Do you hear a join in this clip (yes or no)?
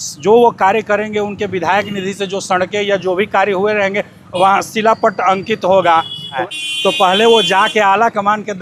yes